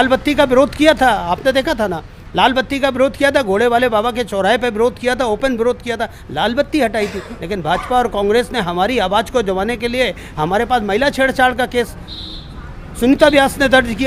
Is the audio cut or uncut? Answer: uncut